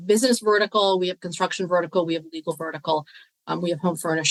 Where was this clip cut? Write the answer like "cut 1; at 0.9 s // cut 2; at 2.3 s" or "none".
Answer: none